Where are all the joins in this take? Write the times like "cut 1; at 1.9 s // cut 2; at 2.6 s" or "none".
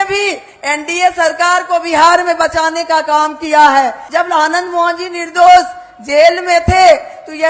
cut 1; at 4.0 s

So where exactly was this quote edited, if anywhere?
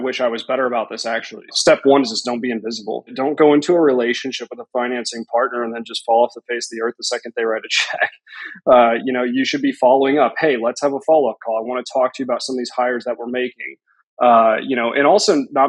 cut 1; at 1.5 s // cut 2; at 3.1 s

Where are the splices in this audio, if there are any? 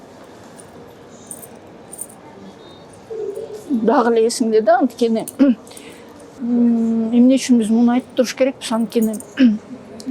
cut 1; at 6.4 s

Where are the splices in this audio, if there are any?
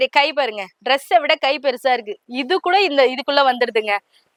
none

